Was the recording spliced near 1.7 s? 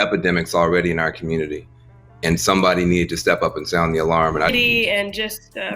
no; 1 cut; at 4.5 s

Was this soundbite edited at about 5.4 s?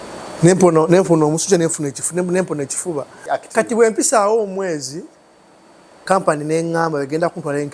no; 1 cut; at 3.1 s

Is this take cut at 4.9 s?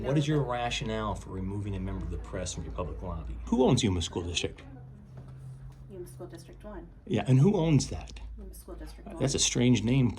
no; 1 cut; at 3.5 s

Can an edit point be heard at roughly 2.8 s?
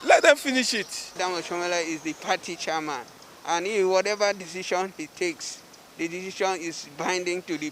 no; 1 cut; at 1.3 s

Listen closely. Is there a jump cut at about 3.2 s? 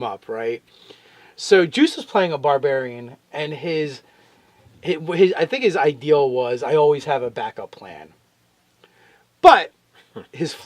yes; 1 cut; at 3.2 s

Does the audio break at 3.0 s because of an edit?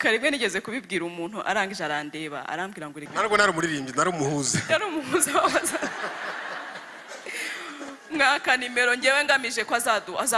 yes; 1 cut; at 3.0 s

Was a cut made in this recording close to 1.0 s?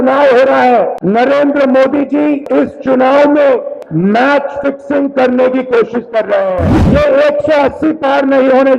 yes; 4 cuts; at 1.0 s, 2.4 s, 3.8 s, 6.8 s

